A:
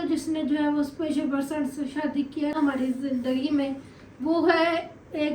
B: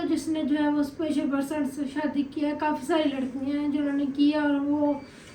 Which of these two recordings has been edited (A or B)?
A